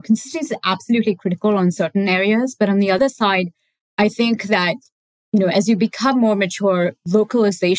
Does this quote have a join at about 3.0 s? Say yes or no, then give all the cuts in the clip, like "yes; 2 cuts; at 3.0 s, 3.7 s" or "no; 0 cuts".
yes; 1 cut; at 3.0 s